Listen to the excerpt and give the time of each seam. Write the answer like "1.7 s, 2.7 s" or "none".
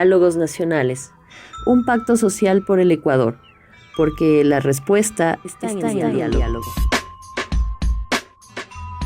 6.7 s